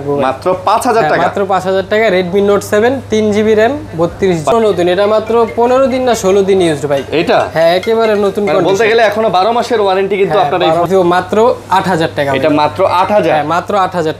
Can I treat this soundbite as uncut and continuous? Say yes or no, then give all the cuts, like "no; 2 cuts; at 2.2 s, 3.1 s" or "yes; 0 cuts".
no; 2 cuts; at 4.5 s, 10.9 s